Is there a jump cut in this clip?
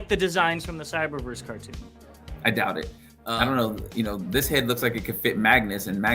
yes; 1 cut; at 3.1 s

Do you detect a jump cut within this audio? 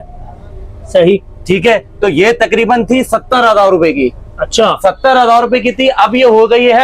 no; 0 cuts

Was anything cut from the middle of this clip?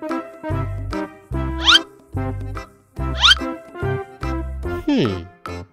yes; 1 cut; at 1.3 s

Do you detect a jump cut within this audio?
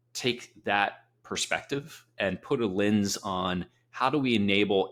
no; 0 cuts

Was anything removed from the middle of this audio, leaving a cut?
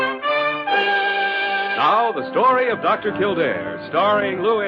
yes; 1 cut; at 3.3 s

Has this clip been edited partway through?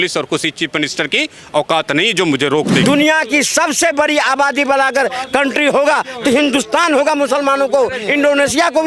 yes; 1 cut; at 2.8 s

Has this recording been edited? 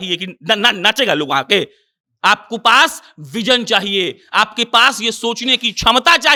no; 0 cuts

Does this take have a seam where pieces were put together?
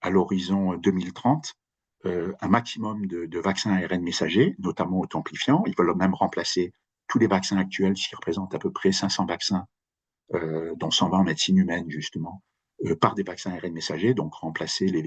no; 0 cuts

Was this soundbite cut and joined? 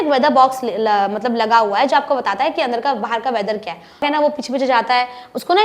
yes; 1 cut; at 4.0 s

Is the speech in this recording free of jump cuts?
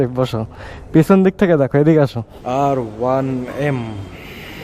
no; 1 cut; at 2.3 s

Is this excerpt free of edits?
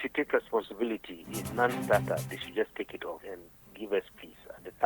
no; 2 cuts; at 1.4 s, 3.2 s

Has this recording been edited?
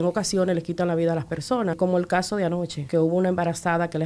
yes; 2 cuts; at 1.8 s, 2.8 s

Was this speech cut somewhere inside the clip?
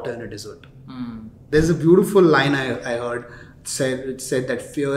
yes; 1 cut; at 1.3 s

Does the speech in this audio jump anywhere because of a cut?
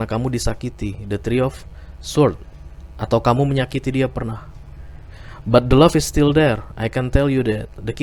no; 0 cuts

